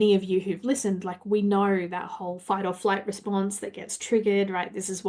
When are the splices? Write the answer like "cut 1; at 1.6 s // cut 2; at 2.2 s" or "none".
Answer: none